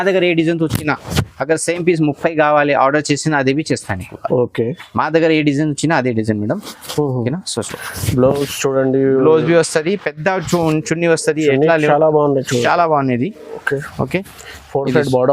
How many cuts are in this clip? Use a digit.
1